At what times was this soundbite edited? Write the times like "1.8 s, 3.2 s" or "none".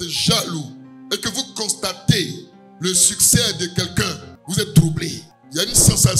none